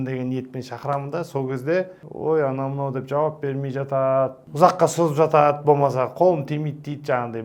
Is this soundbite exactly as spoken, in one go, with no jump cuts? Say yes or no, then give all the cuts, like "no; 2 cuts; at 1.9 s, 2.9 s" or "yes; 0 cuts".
no; 2 cuts; at 2.0 s, 4.4 s